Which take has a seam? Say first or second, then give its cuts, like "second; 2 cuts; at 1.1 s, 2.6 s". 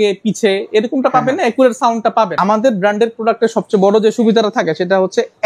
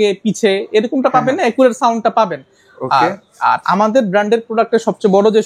first; 1 cut; at 2.3 s